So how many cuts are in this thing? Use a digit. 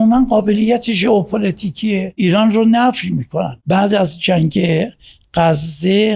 2